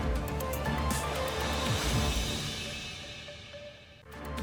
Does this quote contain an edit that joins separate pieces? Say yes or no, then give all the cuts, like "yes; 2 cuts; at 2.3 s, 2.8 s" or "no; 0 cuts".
no; 0 cuts